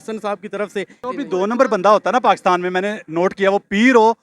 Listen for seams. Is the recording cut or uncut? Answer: cut